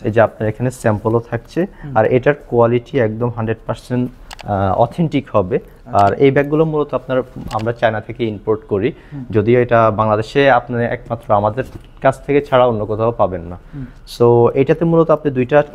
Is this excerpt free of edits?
yes; 0 cuts

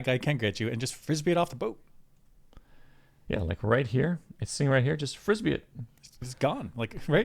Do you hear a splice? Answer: no; 0 cuts

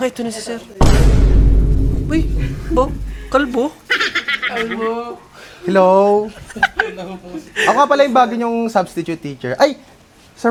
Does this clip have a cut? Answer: no; 0 cuts

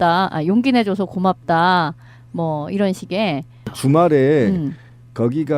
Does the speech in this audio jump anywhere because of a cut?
yes; 1 cut; at 1.4 s

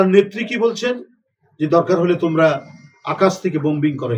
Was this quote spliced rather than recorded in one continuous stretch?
no; 0 cuts

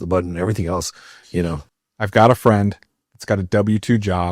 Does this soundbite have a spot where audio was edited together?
yes; 1 cut; at 1.7 s

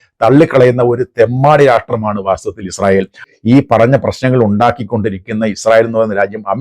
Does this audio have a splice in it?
yes; 1 cut; at 3.3 s

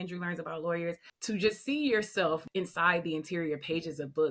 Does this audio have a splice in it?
yes; 2 cuts; at 1.1 s, 2.5 s

